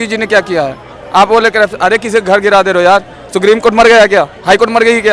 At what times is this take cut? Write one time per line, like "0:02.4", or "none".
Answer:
none